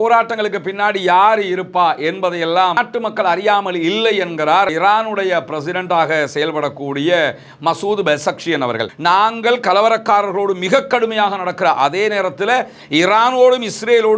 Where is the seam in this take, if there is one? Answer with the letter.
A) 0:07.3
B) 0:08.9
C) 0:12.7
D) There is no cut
B